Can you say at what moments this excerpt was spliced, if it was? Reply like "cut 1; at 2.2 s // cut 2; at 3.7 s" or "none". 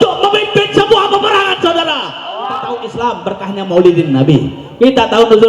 cut 1; at 2.6 s